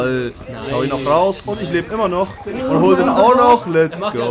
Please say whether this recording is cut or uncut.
uncut